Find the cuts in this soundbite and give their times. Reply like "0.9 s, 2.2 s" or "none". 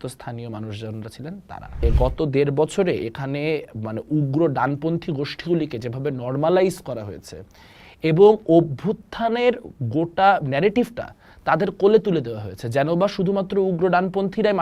1.8 s